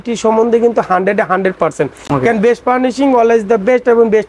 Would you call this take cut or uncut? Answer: uncut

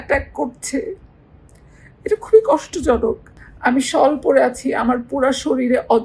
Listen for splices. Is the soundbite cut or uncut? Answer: cut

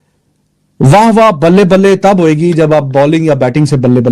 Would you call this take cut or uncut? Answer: uncut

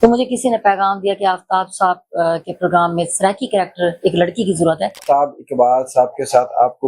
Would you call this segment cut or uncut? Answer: cut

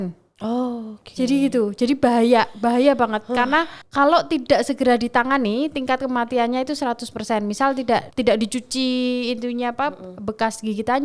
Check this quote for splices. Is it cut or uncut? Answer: cut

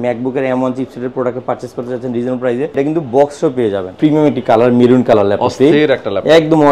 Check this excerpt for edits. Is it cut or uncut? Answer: cut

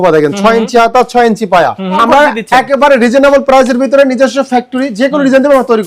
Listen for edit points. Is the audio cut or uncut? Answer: cut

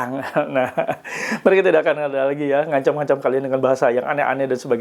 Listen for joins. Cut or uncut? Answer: uncut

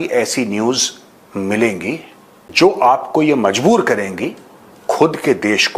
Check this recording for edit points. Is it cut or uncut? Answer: uncut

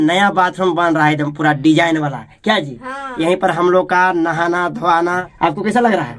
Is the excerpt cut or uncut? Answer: cut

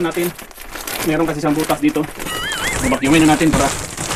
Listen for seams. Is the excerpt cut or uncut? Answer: uncut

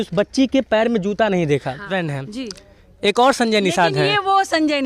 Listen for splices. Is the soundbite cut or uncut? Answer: cut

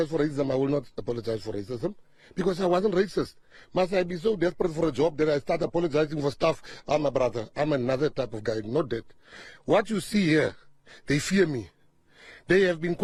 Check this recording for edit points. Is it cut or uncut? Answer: uncut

